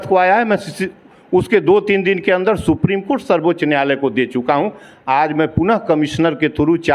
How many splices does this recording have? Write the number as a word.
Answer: zero